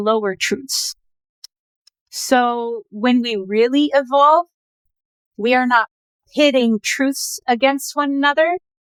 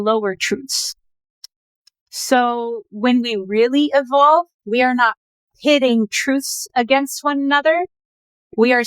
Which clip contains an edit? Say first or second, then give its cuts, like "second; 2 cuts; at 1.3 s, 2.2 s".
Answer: second; 1 cut; at 4.6 s